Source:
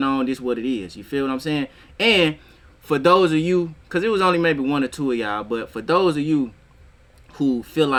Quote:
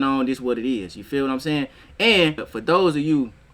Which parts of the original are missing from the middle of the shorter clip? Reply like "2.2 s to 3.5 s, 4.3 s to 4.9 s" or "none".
2.5 s to 5.7 s